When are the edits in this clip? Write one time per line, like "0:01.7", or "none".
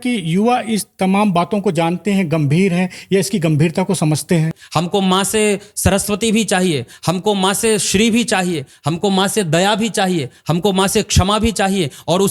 0:04.6